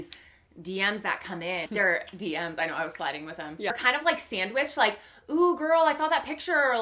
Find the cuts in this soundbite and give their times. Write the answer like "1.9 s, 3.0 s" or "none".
1.7 s, 3.7 s